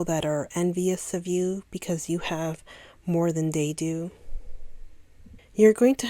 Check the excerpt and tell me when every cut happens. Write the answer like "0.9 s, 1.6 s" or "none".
none